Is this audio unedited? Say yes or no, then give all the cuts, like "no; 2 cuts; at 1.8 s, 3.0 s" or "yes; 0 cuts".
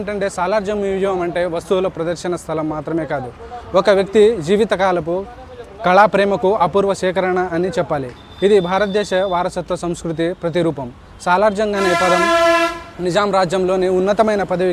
yes; 0 cuts